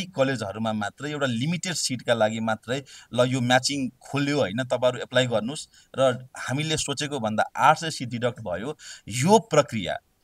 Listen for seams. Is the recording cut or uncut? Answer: uncut